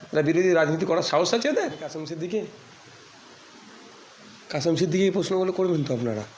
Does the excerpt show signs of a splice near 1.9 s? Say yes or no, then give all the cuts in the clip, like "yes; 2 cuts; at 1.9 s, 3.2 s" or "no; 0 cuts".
yes; 1 cut; at 1.9 s